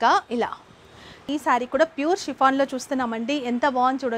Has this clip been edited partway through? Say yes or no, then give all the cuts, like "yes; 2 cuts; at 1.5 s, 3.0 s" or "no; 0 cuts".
yes; 1 cut; at 1.3 s